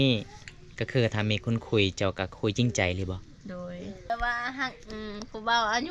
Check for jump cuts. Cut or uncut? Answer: cut